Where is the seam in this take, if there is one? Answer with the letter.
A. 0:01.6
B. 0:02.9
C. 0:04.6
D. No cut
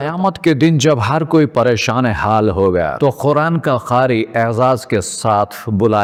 D